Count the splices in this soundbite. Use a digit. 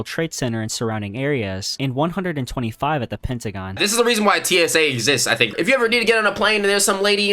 2